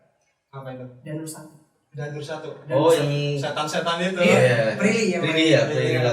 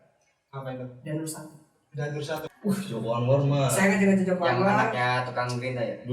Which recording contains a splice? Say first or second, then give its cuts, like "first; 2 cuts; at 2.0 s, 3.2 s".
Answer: second; 1 cut; at 2.4 s